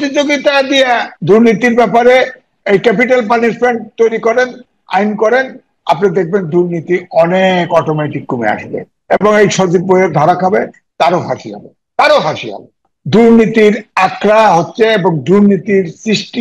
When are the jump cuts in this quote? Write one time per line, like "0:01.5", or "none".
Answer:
0:01.1
0:12.9